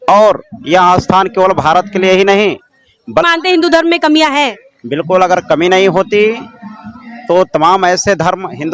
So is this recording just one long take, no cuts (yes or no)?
no